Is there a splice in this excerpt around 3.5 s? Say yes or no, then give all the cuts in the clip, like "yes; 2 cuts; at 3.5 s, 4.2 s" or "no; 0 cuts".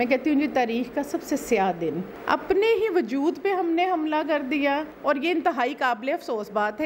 no; 2 cuts; at 2.1 s, 4.9 s